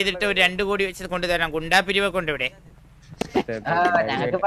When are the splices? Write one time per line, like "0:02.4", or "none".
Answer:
none